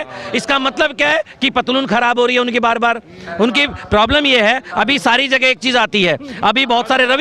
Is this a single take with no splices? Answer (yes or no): yes